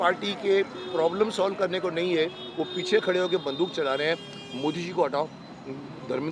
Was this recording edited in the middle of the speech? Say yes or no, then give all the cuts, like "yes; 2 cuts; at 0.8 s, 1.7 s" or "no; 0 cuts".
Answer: no; 0 cuts